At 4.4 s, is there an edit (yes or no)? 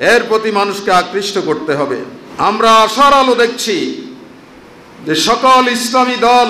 no